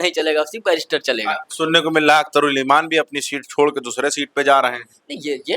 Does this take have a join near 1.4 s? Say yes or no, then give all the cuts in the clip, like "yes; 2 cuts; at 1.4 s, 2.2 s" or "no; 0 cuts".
no; 0 cuts